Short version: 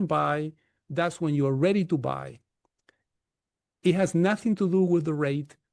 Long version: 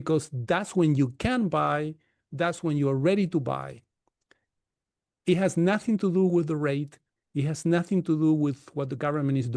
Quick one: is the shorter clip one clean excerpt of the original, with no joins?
yes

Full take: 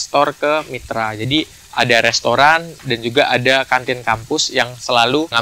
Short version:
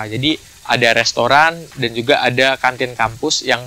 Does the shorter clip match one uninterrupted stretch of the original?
yes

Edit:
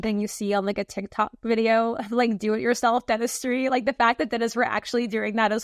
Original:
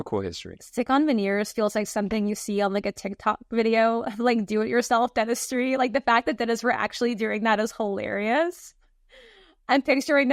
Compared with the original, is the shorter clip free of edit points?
yes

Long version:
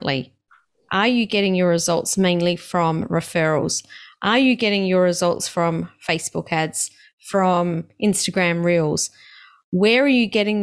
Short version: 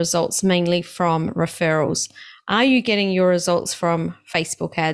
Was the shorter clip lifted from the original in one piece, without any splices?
yes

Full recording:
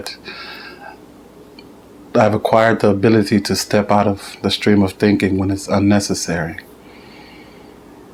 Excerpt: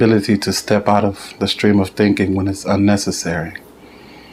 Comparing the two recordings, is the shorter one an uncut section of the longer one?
yes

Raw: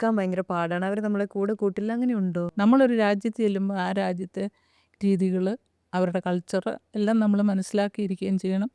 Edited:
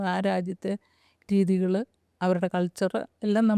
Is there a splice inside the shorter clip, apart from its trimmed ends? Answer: no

